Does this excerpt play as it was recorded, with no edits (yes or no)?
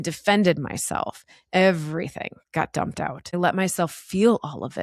no